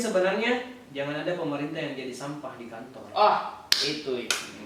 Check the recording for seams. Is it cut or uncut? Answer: uncut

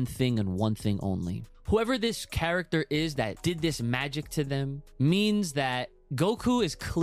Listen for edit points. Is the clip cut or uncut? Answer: cut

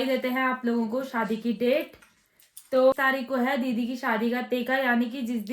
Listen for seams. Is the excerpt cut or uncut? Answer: cut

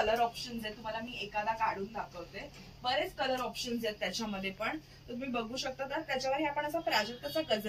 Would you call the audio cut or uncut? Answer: uncut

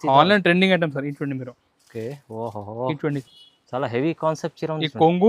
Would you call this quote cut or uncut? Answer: cut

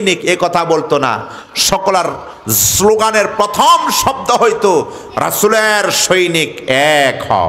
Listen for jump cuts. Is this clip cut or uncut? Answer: uncut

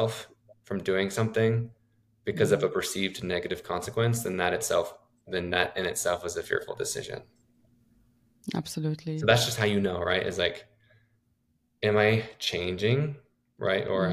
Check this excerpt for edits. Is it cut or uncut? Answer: uncut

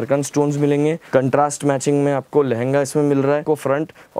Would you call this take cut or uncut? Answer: cut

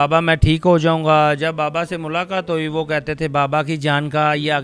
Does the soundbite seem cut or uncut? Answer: uncut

